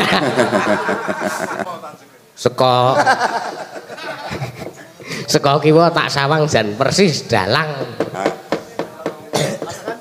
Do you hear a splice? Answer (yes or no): yes